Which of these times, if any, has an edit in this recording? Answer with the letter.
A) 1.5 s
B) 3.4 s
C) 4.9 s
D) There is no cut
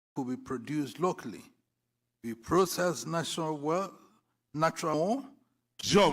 C